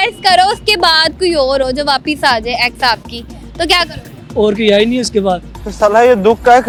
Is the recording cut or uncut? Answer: uncut